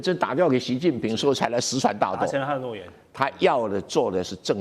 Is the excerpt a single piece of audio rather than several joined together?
yes; 0 cuts

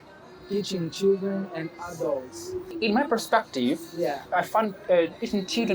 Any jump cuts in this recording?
yes; 2 cuts; at 2.8 s, 4.2 s

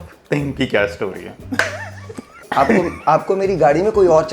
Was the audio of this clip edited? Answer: yes; 1 cut; at 2.4 s

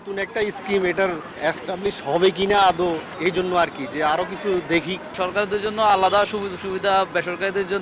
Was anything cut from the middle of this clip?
yes; 3 cuts; at 1.3 s, 3.1 s, 5.1 s

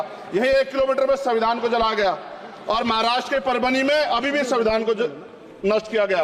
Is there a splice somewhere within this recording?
no; 0 cuts

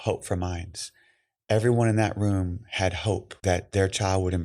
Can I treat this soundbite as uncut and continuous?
no; 1 cut; at 3.3 s

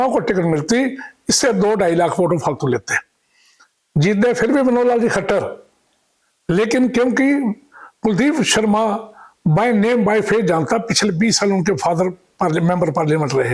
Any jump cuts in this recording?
no; 0 cuts

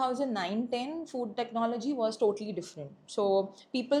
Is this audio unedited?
yes; 0 cuts

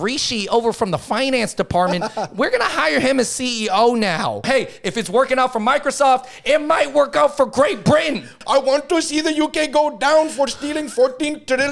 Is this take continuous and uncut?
no; 2 cuts; at 4.4 s, 8.3 s

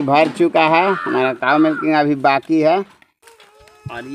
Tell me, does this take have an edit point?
yes; 1 cut; at 3.1 s

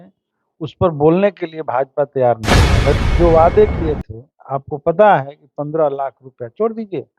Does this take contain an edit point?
yes; 1 cut; at 2.9 s

